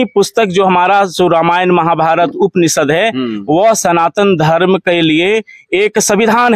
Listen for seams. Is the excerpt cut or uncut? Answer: uncut